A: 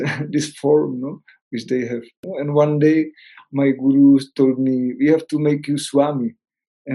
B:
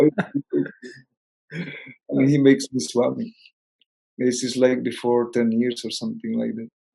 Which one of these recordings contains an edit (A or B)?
A